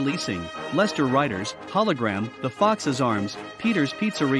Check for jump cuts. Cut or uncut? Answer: uncut